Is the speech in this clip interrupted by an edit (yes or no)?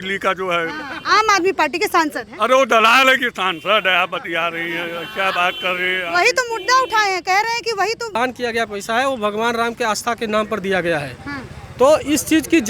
yes